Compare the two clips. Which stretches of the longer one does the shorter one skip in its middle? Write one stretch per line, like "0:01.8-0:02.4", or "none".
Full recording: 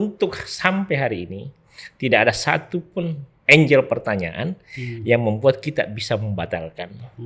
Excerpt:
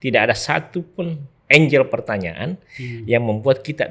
none